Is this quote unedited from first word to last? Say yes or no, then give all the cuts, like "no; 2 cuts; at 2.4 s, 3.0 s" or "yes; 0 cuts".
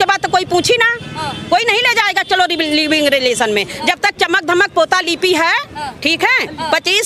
yes; 0 cuts